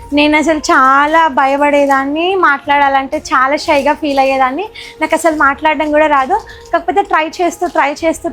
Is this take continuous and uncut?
yes; 0 cuts

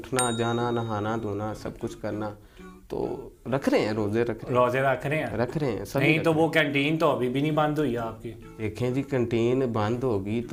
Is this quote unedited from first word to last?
yes; 0 cuts

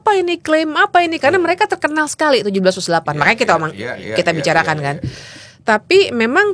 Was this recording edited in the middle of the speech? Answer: no; 0 cuts

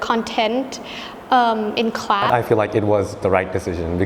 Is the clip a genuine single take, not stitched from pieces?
no; 1 cut; at 2.3 s

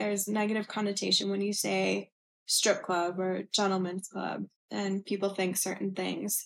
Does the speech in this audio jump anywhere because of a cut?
no; 0 cuts

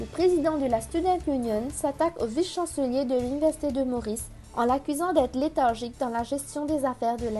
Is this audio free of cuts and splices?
yes; 0 cuts

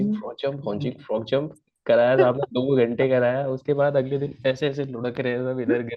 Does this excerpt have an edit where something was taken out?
no; 0 cuts

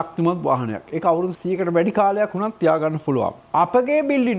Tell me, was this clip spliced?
yes; 2 cuts; at 1.3 s, 3.4 s

